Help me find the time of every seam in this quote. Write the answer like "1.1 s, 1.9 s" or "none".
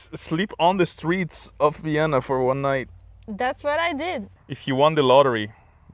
4.3 s